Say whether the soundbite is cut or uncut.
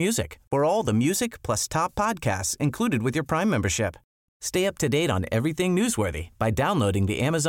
uncut